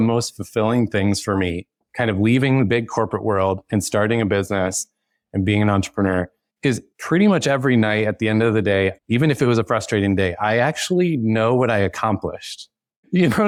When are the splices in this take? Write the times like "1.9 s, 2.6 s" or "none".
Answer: none